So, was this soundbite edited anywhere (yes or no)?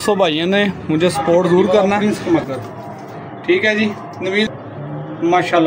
yes